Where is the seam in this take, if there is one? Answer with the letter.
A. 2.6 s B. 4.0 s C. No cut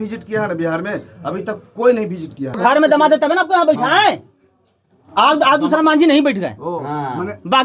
A